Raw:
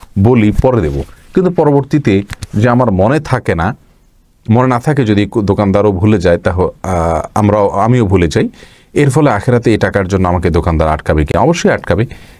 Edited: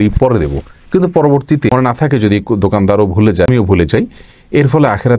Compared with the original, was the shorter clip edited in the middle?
yes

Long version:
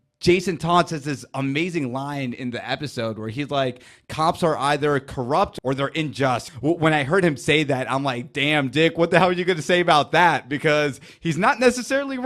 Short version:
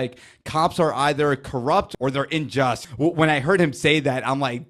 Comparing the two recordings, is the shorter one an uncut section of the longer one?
yes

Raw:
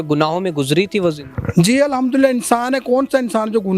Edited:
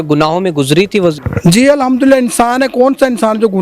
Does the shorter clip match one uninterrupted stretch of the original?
no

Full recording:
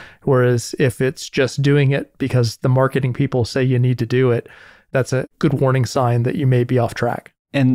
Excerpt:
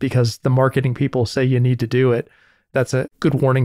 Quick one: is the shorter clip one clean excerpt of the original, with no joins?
yes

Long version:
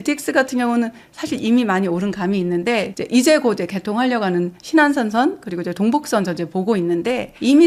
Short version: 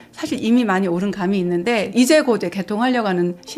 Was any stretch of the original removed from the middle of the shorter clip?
yes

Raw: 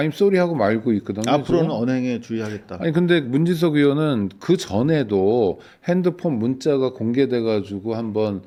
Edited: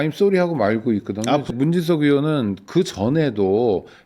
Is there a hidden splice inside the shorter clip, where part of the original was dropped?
yes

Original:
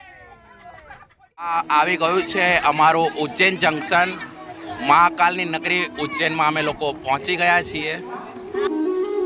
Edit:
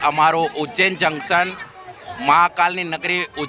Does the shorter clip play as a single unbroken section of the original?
yes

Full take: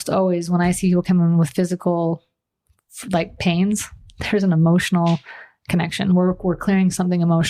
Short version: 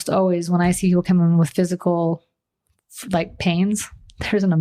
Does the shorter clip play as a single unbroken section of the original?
yes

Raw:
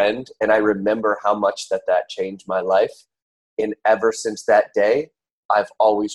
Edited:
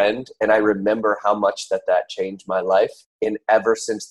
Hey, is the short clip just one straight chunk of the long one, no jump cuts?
no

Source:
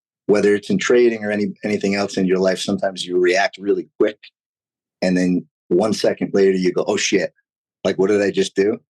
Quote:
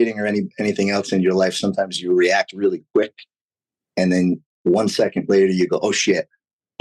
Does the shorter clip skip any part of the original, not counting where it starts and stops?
no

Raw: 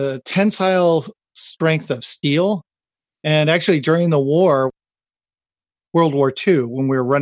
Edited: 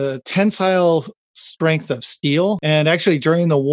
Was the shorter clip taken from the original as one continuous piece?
no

